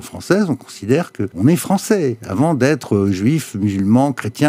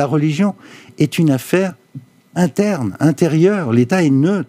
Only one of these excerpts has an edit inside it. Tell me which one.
first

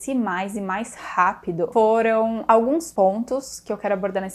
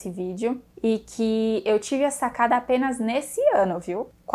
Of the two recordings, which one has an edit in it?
first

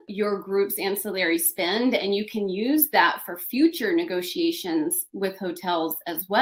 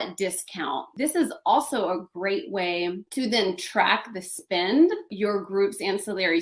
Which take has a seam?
second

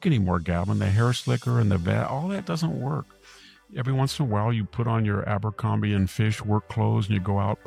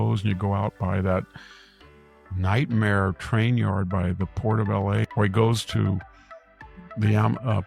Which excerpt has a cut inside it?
second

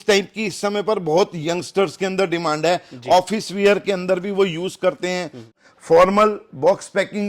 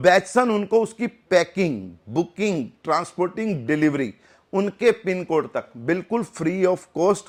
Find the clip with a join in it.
first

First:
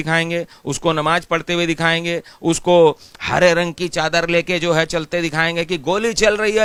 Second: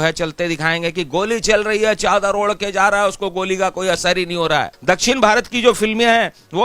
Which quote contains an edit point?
second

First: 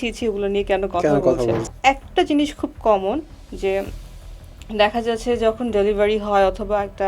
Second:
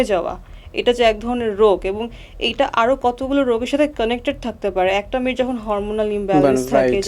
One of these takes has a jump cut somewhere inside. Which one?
first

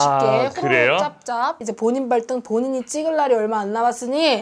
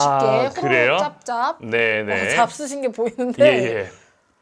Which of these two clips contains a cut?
first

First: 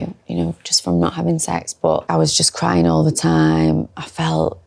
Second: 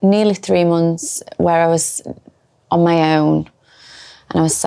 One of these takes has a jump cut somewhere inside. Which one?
first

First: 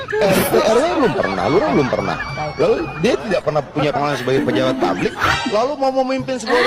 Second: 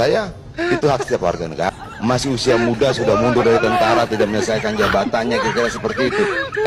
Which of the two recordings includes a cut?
second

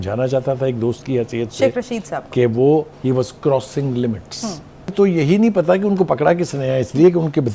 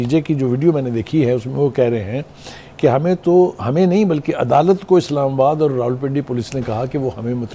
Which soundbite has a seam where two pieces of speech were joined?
first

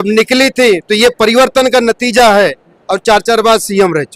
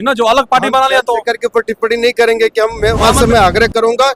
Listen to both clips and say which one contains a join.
second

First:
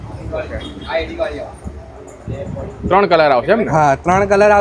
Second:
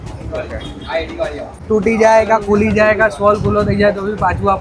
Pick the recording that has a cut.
second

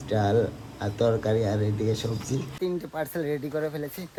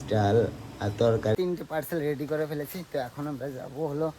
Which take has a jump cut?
second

